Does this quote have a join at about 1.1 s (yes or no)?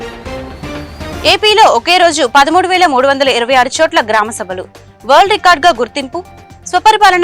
yes